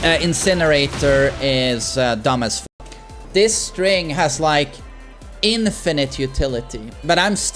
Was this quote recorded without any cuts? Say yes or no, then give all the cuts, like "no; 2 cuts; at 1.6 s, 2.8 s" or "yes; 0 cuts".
no; 1 cut; at 2.6 s